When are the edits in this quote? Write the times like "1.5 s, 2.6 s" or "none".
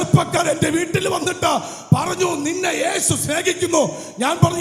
none